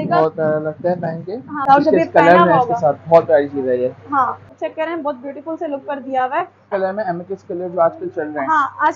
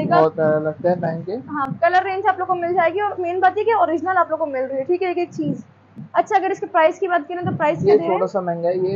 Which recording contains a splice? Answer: first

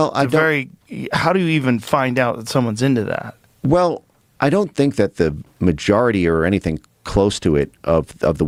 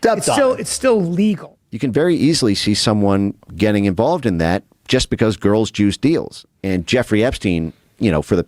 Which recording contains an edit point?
second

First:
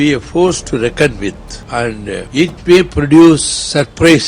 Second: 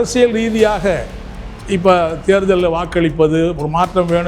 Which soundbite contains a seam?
first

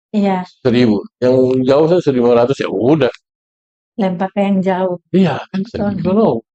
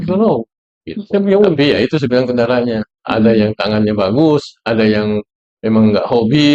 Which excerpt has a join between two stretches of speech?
second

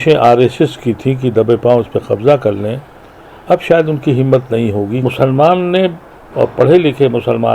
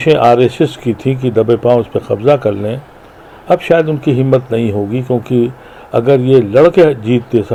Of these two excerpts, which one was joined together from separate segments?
first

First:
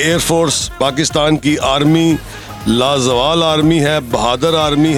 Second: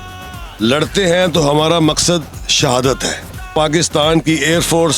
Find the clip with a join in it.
second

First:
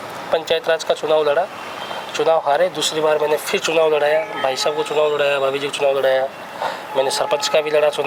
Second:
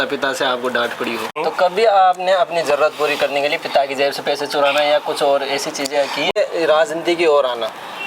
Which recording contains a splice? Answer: second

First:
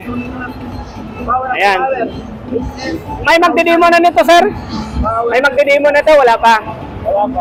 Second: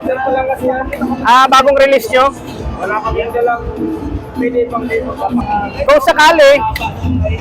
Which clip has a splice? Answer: second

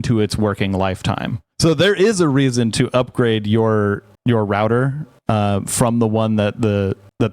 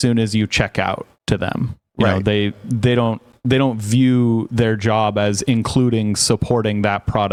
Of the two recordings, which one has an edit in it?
first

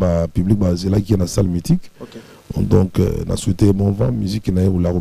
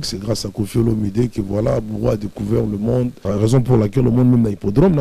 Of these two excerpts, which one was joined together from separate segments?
second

